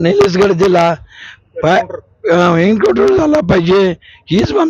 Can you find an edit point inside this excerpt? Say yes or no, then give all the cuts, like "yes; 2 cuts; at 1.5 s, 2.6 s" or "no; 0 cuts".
no; 0 cuts